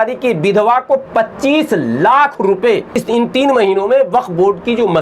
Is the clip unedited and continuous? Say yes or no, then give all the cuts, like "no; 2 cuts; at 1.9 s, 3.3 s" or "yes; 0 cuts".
no; 1 cut; at 3.0 s